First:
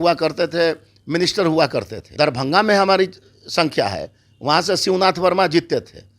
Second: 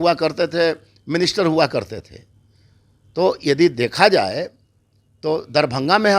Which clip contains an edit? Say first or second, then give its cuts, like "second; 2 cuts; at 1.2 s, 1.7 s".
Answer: first; 1 cut; at 2.1 s